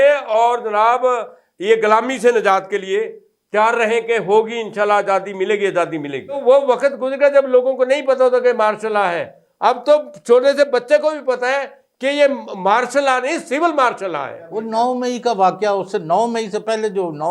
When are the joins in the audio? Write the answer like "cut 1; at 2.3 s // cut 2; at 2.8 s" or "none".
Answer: cut 1; at 6.4 s // cut 2; at 14.6 s